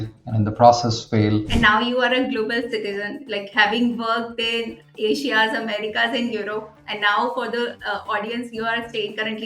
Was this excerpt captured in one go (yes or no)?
no